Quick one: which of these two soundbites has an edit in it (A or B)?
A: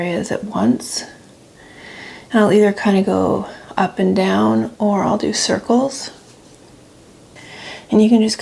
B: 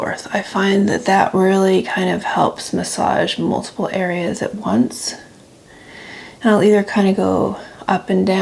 A